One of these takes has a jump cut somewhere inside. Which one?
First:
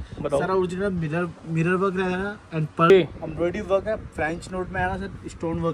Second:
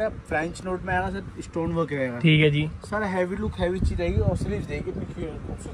first; 1 cut; at 2.9 s

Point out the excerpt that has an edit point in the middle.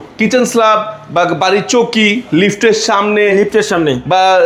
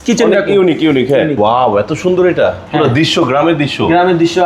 second; 1 cut; at 1.4 s

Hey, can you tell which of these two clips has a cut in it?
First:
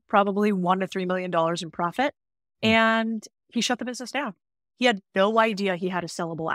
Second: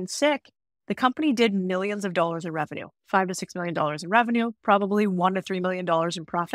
first; 1 cut; at 3.3 s

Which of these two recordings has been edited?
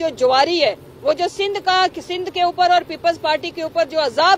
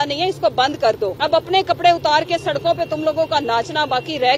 second; 1 cut; at 1.1 s

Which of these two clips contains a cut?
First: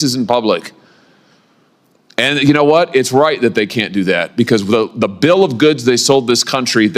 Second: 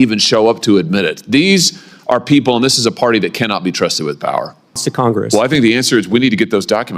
second; 1 cut; at 4.9 s

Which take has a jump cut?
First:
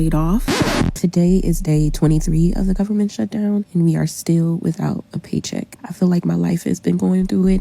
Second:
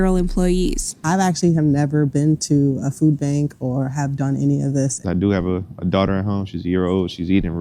first; 3 cuts; at 0.9 s, 3.7 s, 5.6 s

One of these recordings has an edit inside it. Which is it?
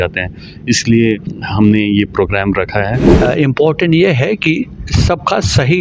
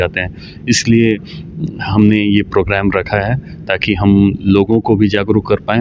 first; 2 cuts; at 1.4 s, 3.1 s

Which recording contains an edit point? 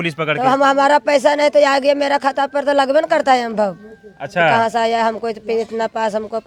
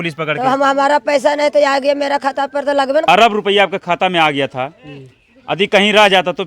second; 1 cut; at 3.0 s

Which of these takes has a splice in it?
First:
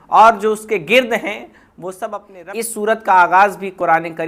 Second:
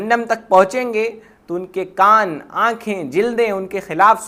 first; 1 cut; at 2.4 s

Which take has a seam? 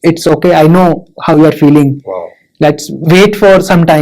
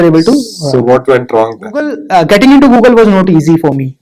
second; 1 cut; at 2.0 s

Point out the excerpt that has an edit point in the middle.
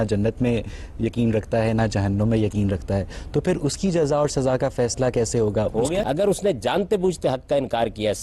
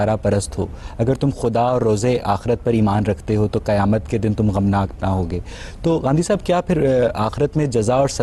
first; 1 cut; at 6.0 s

